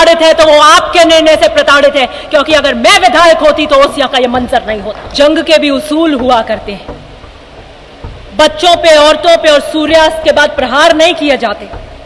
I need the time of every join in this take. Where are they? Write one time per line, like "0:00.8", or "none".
0:05.0